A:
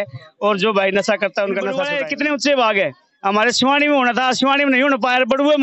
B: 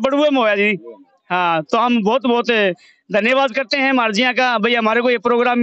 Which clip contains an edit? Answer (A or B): A